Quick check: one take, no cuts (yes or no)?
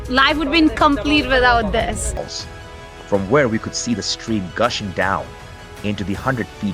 no